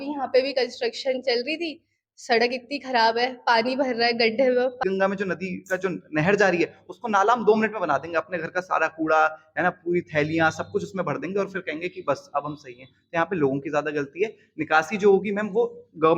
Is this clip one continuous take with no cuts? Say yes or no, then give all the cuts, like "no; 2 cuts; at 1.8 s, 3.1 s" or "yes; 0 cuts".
no; 1 cut; at 4.8 s